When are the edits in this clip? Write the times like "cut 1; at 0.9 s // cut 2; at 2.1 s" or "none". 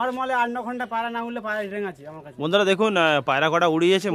none